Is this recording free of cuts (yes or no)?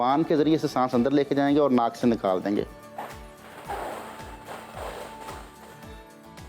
yes